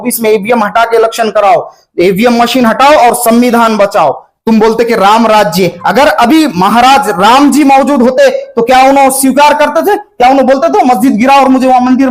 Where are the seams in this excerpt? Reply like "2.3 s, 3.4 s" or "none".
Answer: 4.3 s